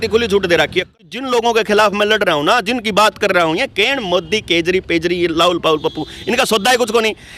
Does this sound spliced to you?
yes; 1 cut; at 0.9 s

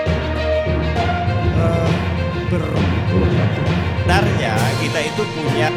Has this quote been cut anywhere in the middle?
no; 0 cuts

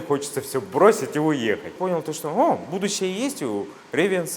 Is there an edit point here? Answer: yes; 1 cut; at 1.8 s

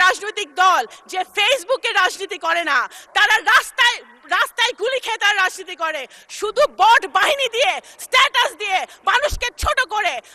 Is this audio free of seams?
yes; 0 cuts

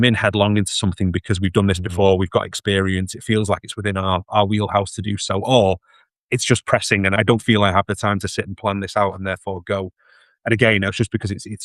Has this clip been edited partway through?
yes; 1 cut; at 7.2 s

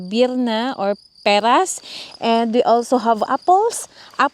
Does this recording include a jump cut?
no; 0 cuts

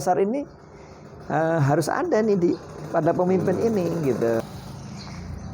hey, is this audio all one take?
no; 1 cut; at 4.5 s

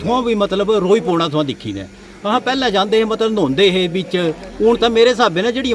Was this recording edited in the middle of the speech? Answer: no; 0 cuts

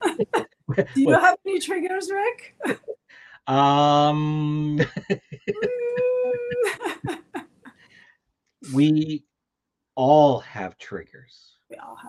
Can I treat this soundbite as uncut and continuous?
yes; 0 cuts

